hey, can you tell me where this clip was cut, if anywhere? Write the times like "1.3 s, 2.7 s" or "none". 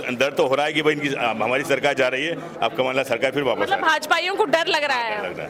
none